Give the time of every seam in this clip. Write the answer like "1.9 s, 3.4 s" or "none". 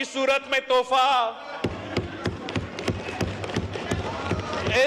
none